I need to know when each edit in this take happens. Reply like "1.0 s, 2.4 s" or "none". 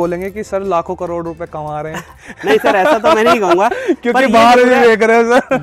none